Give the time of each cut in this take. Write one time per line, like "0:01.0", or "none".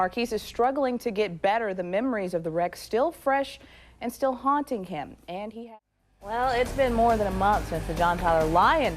0:05.5